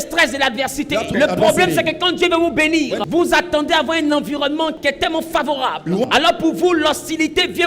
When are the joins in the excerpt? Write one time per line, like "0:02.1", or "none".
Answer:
0:01.1
0:03.0
0:04.8
0:06.1